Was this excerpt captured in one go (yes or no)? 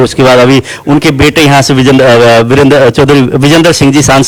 yes